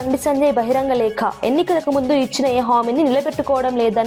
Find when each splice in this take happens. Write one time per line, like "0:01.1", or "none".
none